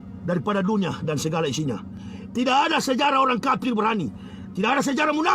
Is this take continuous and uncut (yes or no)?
yes